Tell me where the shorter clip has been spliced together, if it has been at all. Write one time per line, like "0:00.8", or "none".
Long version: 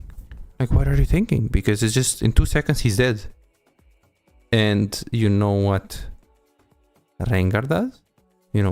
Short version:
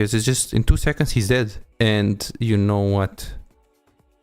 0:01.6